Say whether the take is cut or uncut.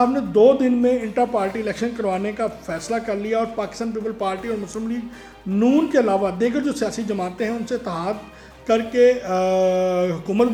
uncut